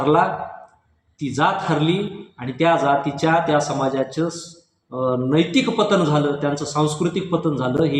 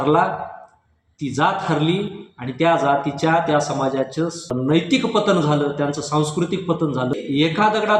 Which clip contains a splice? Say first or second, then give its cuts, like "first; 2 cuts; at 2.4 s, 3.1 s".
second; 2 cuts; at 4.9 s, 7.1 s